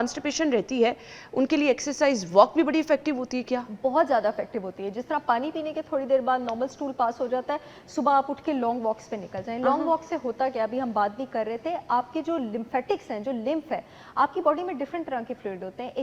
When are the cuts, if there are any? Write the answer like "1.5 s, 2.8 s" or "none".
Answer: none